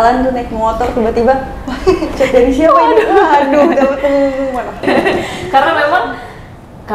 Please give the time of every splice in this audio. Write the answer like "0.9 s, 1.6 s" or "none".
4.8 s